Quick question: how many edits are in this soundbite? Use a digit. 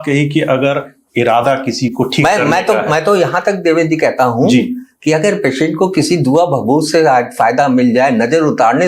0